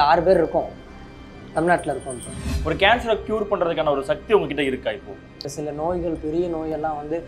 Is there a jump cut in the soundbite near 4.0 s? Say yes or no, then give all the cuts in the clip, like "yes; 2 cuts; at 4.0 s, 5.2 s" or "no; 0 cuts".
no; 2 cuts; at 2.5 s, 5.4 s